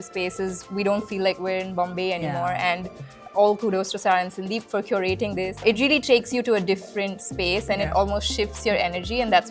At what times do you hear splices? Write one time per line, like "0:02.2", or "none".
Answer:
0:03.1
0:05.6